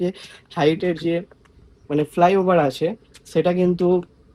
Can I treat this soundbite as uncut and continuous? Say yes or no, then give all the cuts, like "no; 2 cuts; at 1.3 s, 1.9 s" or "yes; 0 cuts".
yes; 0 cuts